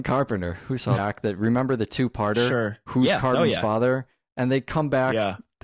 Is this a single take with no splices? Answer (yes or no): yes